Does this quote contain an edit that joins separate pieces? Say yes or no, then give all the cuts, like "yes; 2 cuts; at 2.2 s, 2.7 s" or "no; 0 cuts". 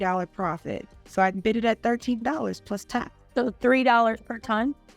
yes; 1 cut; at 3.2 s